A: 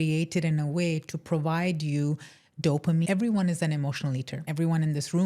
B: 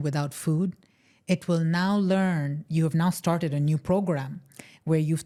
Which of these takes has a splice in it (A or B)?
A